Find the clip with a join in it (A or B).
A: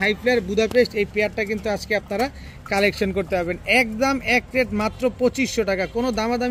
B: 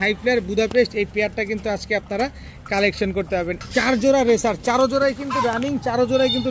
B